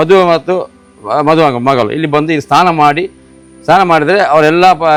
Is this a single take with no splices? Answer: yes; 0 cuts

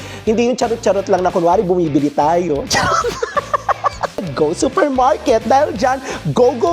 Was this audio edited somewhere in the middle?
yes; 1 cut; at 4.3 s

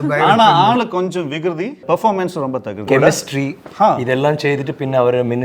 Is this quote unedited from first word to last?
no; 2 cuts; at 1.8 s, 2.9 s

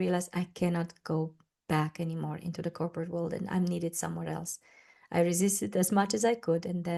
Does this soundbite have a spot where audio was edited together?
no; 0 cuts

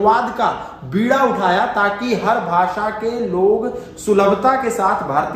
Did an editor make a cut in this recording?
no; 0 cuts

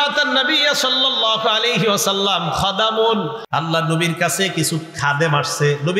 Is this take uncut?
no; 1 cut; at 3.4 s

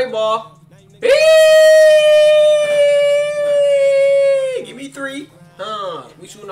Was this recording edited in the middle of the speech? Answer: no; 0 cuts

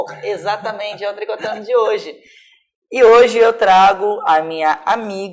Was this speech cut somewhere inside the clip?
yes; 1 cut; at 4.1 s

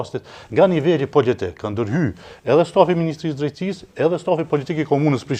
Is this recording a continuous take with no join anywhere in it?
yes; 0 cuts

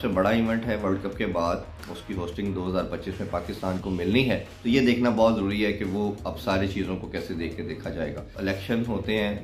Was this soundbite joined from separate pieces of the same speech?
yes; 2 cuts; at 4.5 s, 8.3 s

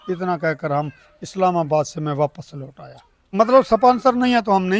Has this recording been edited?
yes; 1 cut; at 3.3 s

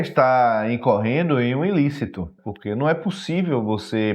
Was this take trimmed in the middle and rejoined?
yes; 1 cut; at 2.4 s

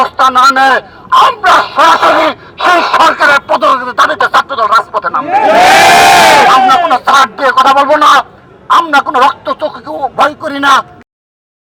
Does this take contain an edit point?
no; 0 cuts

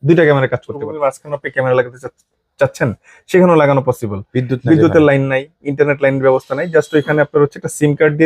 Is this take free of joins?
no; 1 cut; at 0.9 s

